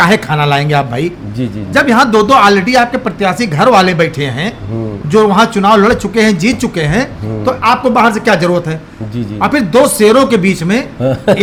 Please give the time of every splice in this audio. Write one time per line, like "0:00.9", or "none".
none